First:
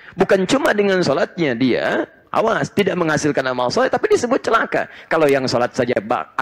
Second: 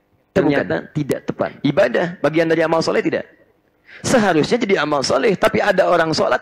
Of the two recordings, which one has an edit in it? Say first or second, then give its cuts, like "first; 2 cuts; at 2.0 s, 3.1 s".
second; 1 cut; at 1.5 s